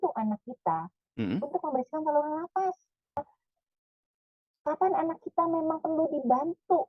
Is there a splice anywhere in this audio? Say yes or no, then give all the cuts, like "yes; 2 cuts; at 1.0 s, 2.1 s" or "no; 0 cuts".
yes; 1 cut; at 3.3 s